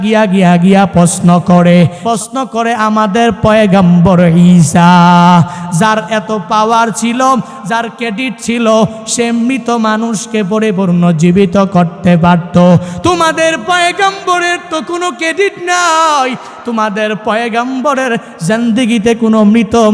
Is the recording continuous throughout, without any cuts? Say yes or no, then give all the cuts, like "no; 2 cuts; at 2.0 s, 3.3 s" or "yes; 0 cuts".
no; 1 cut; at 2.0 s